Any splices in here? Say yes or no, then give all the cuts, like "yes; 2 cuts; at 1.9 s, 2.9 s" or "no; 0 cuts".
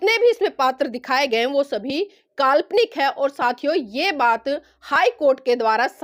no; 0 cuts